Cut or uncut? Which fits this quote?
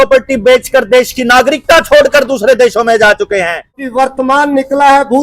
cut